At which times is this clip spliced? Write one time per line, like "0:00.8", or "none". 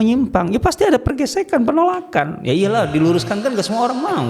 none